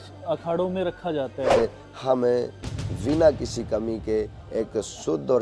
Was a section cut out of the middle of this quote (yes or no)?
yes